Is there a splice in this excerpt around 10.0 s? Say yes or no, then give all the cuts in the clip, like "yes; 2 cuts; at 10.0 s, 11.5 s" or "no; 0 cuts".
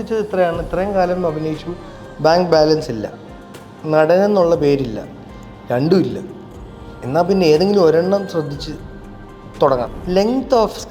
yes; 1 cut; at 10.0 s